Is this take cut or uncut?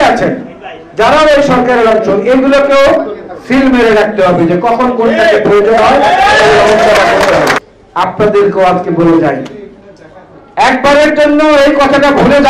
cut